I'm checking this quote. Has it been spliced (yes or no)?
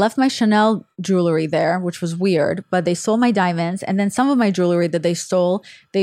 no